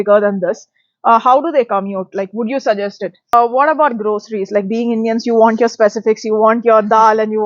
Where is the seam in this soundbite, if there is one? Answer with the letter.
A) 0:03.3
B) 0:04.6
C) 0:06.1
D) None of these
A